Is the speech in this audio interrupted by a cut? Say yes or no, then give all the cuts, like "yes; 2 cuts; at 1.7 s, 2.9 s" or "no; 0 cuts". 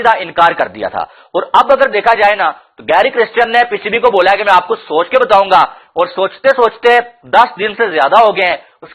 no; 0 cuts